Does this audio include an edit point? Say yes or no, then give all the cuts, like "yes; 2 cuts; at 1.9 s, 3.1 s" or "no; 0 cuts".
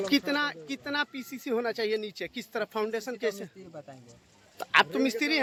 no; 0 cuts